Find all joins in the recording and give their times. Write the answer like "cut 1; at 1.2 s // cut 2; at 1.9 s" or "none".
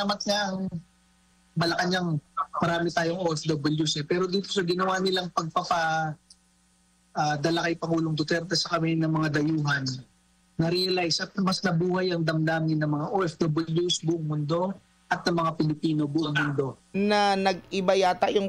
cut 1; at 16.8 s